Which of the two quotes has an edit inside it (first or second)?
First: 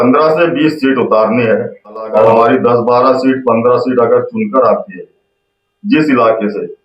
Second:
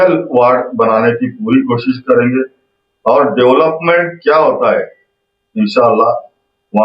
first